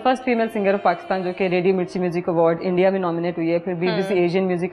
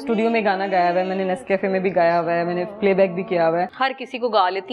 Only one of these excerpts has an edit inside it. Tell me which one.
second; 1 cut; at 3.7 s

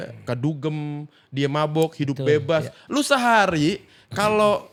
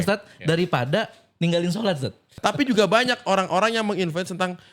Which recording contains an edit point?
second; 1 cut; at 2.2 s

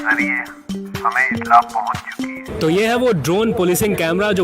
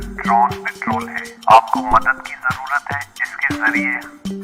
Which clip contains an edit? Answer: first; 1 cut; at 2.5 s

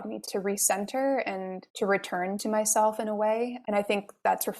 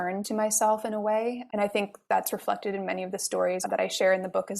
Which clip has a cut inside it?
second; 1 cut; at 3.6 s

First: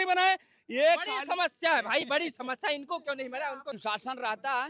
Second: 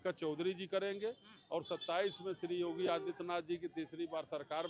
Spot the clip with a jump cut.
first; 1 cut; at 3.8 s

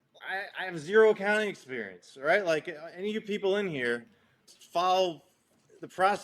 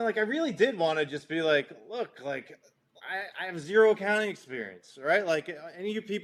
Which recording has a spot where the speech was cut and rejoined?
first; 1 cut; at 4.4 s

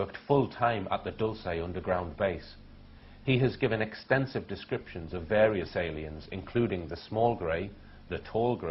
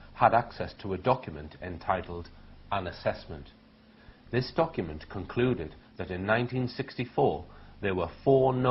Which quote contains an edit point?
first; 1 cut; at 1.0 s

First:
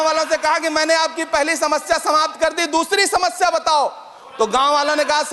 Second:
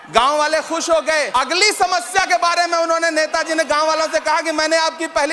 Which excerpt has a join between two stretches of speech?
second; 1 cut; at 1.3 s

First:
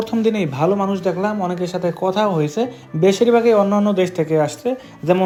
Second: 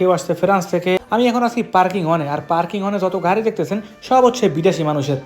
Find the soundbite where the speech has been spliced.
second; 1 cut; at 1.0 s

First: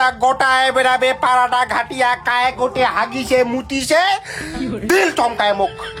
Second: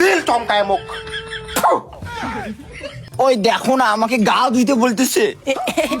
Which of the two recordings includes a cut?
second; 1 cut; at 3.0 s

